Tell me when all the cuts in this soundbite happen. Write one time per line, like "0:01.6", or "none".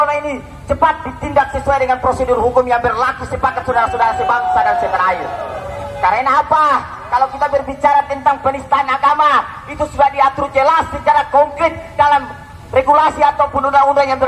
none